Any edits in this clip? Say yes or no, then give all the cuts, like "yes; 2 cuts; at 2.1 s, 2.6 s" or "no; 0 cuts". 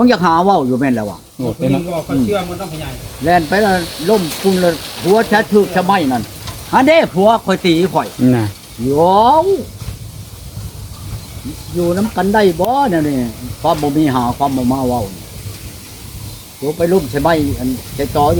no; 0 cuts